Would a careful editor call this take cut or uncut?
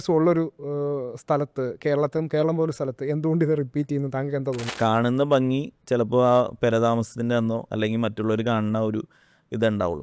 cut